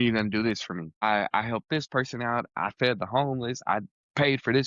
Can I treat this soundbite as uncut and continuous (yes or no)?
no